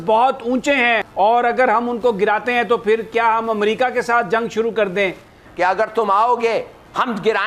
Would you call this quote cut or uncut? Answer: cut